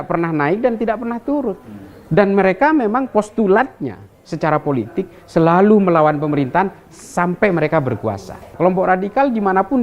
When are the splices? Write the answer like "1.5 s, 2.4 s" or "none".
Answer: 8.4 s